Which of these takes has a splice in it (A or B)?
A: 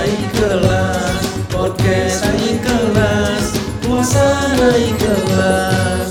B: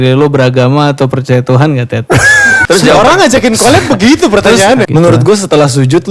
B